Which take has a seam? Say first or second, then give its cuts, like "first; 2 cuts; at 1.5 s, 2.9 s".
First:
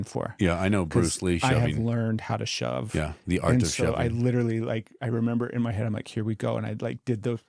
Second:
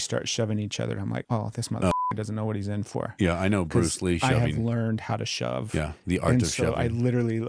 second; 1 cut; at 1.2 s